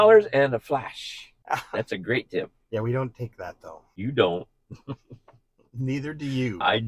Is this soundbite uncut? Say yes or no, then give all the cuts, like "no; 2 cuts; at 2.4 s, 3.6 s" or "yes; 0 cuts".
no; 1 cut; at 1.4 s